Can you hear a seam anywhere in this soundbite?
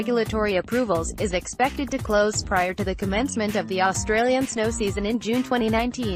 no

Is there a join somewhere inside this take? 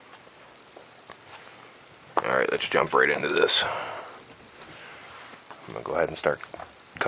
yes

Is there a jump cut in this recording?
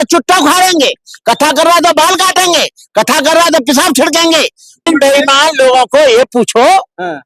yes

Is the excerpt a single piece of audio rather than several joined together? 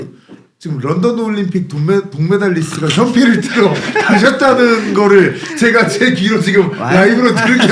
yes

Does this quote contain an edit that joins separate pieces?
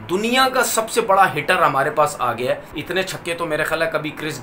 yes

